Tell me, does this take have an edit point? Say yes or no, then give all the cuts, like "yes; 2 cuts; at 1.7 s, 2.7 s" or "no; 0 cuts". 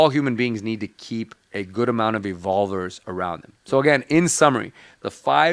no; 0 cuts